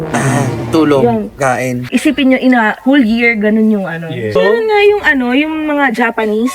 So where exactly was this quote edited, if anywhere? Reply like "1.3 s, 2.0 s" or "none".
1.8 s, 4.4 s